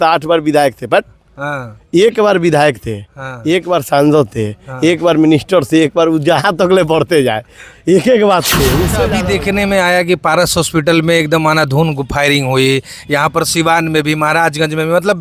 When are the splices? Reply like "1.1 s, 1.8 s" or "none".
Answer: 9.0 s